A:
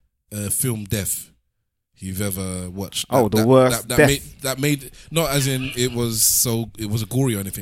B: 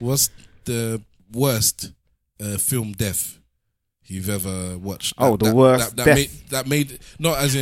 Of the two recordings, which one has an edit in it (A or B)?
B